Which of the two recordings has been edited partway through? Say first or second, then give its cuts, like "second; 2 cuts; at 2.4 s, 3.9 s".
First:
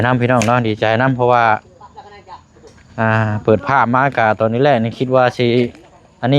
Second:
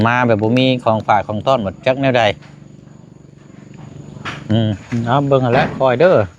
second; 1 cut; at 4.8 s